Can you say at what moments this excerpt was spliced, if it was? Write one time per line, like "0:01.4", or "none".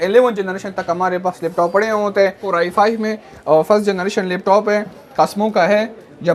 0:02.4